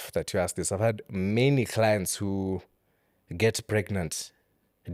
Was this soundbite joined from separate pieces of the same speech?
no; 0 cuts

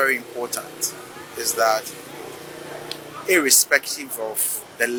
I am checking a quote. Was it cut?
no; 0 cuts

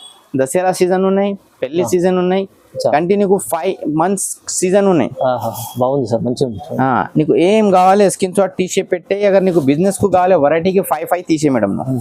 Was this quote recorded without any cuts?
yes; 0 cuts

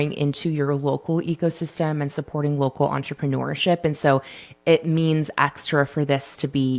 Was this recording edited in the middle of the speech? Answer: no; 0 cuts

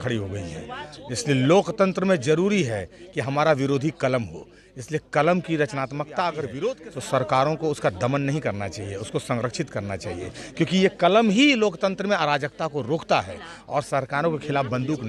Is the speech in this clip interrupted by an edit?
yes; 1 cut; at 6.7 s

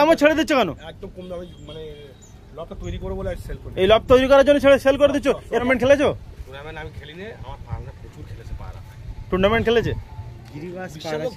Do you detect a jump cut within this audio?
yes; 1 cut; at 5.6 s

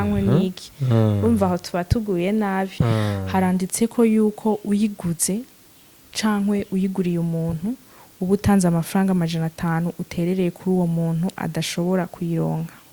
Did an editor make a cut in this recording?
yes; 1 cut; at 2.7 s

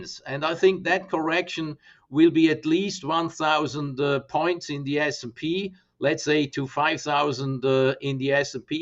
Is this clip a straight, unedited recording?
yes; 0 cuts

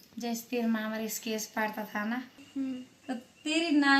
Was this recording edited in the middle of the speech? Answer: yes; 1 cut; at 2.4 s

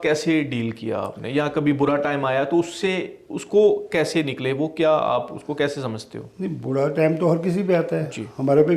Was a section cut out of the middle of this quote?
no; 0 cuts

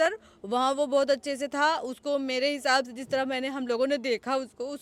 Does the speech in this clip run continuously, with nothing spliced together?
yes; 0 cuts

